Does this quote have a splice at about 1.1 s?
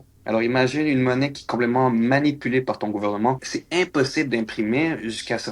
no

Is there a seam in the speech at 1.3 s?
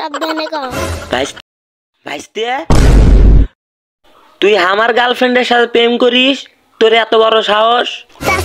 yes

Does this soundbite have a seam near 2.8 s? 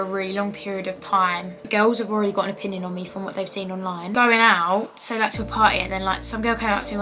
no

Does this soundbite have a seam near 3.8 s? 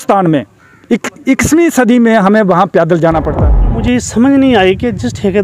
yes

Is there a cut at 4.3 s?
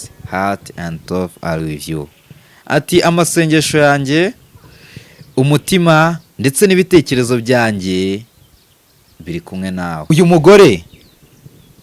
no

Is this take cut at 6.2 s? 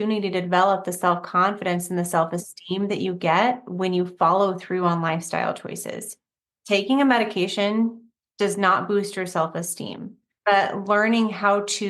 yes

